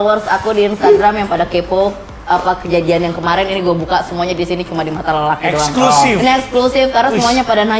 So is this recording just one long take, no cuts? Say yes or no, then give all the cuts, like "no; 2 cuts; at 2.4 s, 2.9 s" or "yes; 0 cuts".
yes; 0 cuts